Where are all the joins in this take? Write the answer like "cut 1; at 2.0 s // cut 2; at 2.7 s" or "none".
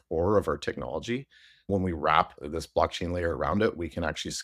cut 1; at 1.7 s // cut 2; at 2.4 s